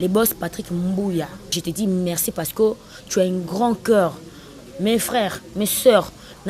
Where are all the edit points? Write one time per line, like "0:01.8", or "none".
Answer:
0:01.6

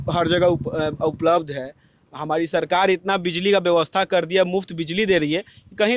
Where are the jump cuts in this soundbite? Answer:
none

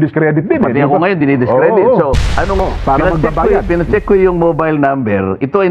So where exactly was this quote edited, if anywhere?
0:02.6

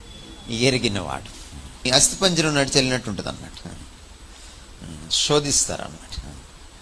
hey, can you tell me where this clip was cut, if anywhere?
0:01.9

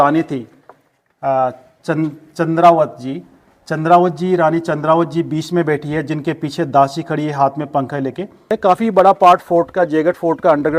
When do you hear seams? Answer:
0:08.5

